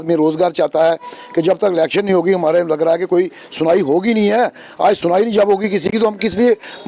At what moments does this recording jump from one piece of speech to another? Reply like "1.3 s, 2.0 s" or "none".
none

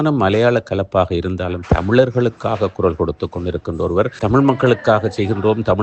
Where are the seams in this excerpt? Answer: 4.2 s

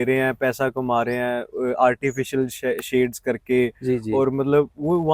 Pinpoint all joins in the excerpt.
none

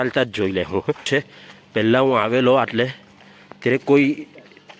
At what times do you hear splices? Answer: 1.1 s

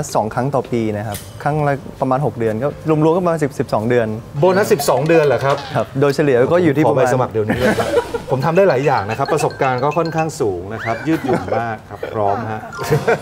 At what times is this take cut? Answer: none

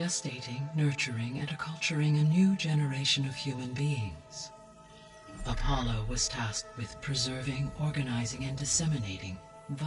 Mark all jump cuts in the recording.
none

